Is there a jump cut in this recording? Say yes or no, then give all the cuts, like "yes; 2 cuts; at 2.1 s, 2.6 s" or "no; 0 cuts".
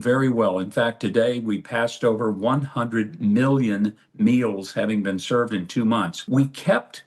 yes; 1 cut; at 6.2 s